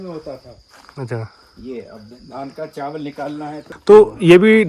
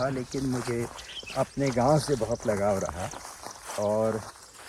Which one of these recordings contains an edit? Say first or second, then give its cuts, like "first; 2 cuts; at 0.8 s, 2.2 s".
first; 1 cut; at 3.6 s